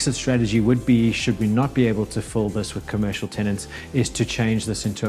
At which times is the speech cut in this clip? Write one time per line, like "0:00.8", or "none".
none